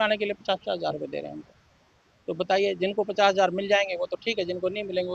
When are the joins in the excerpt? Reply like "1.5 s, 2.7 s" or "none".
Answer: none